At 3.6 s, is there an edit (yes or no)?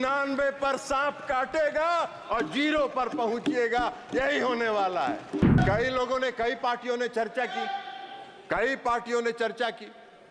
no